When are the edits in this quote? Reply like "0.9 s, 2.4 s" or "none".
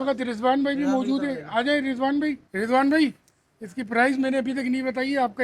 2.4 s